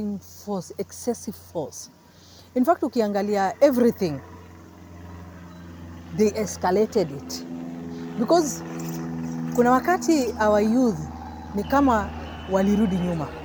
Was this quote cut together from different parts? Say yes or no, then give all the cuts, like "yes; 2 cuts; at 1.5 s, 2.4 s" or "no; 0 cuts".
no; 0 cuts